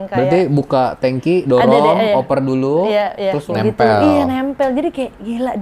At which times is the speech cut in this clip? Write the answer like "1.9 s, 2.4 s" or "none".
3.4 s